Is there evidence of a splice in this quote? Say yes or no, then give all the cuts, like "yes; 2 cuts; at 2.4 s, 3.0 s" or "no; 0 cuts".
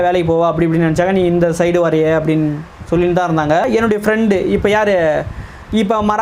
yes; 1 cut; at 3.7 s